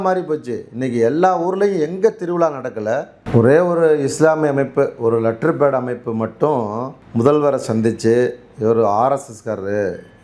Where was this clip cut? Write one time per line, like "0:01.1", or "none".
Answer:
0:03.2
0:06.9